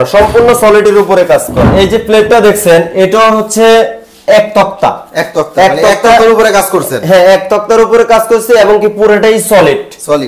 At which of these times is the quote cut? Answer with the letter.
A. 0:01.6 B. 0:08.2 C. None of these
A